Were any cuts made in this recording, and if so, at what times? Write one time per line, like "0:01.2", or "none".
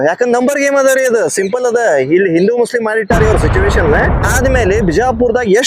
0:04.3